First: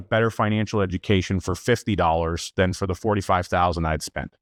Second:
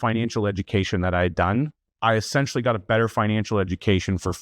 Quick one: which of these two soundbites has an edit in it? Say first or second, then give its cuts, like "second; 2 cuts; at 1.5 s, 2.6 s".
second; 1 cut; at 1.8 s